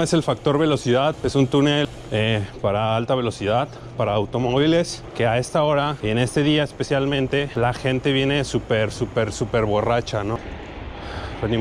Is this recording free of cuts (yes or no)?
no